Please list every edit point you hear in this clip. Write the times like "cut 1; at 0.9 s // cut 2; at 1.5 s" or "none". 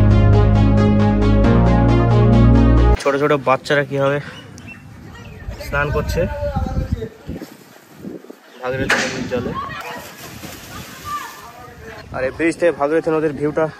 cut 1; at 2.9 s // cut 2; at 9.8 s // cut 3; at 12.0 s